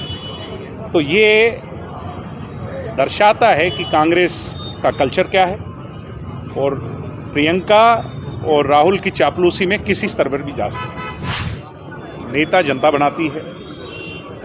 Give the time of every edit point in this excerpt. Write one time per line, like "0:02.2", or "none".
0:11.5